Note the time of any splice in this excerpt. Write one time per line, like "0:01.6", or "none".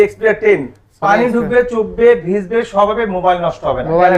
none